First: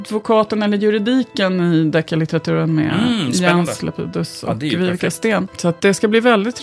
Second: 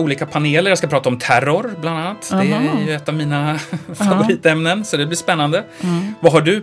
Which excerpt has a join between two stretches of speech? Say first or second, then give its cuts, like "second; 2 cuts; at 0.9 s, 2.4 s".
first; 1 cut; at 5.5 s